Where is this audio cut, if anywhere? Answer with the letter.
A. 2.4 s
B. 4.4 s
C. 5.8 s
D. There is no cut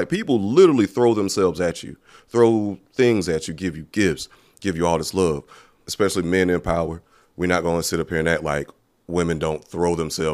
C